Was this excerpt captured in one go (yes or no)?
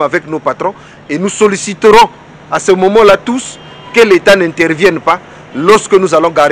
yes